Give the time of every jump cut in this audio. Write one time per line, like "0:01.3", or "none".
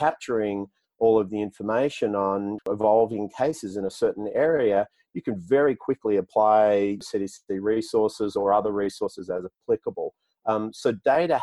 0:02.7
0:07.0